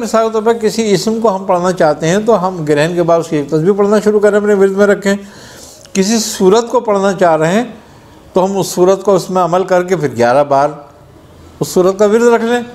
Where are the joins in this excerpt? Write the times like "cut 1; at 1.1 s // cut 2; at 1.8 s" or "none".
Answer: none